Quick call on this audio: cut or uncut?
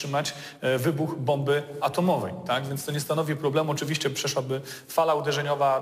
uncut